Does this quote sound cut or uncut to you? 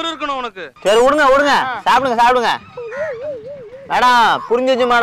uncut